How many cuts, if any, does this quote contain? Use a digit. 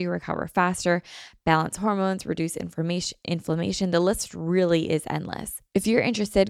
1